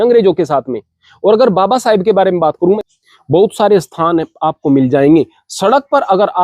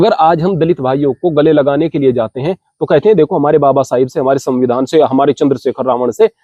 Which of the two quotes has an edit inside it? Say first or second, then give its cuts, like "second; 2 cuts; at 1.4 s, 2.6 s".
first; 1 cut; at 2.8 s